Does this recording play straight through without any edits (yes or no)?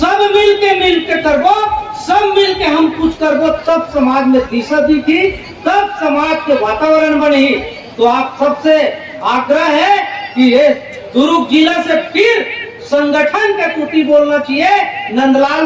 yes